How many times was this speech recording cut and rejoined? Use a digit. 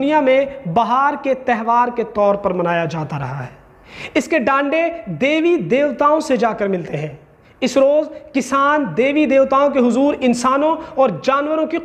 0